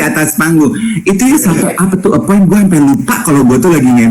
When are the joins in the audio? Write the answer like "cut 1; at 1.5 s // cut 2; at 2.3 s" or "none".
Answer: none